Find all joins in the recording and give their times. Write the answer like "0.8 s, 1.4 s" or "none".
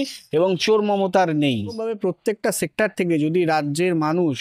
1.9 s

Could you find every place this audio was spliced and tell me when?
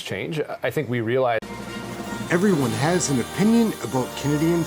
1.4 s

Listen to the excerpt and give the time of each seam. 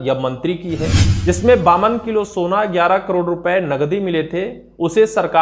1.1 s

